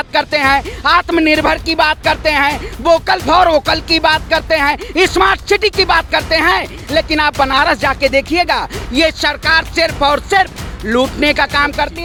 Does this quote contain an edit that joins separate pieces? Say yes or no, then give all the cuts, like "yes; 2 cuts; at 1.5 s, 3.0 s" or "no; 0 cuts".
no; 0 cuts